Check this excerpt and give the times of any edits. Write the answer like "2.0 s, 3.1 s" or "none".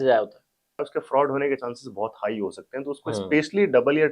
0.9 s